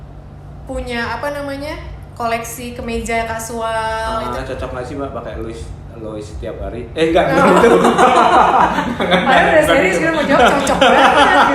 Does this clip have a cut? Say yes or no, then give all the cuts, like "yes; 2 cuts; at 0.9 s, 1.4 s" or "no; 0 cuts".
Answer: yes; 1 cut; at 4.4 s